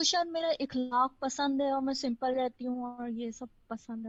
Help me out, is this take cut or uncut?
uncut